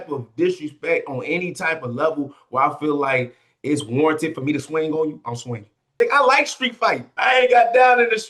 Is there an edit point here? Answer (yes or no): yes